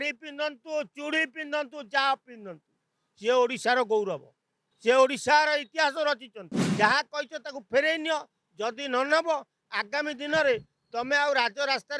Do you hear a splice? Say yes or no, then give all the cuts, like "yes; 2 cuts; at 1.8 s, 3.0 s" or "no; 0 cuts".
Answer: yes; 1 cut; at 6.6 s